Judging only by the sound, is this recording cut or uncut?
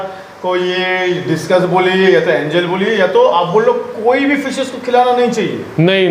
uncut